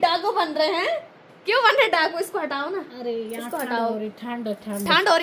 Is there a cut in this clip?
no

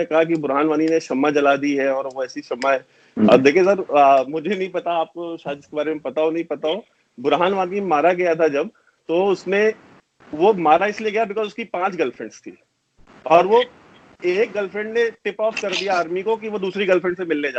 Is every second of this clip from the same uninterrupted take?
yes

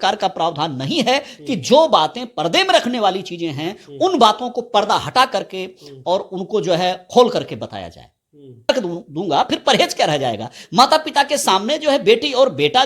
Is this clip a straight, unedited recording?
no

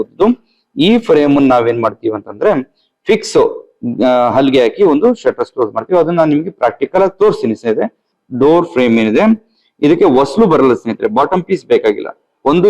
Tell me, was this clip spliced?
yes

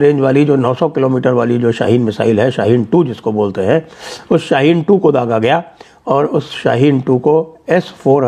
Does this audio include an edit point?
no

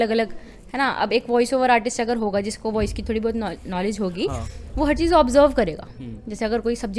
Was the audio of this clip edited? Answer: no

